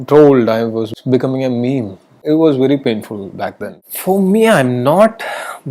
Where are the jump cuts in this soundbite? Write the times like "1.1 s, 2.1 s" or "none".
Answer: 0.9 s, 2.2 s, 3.8 s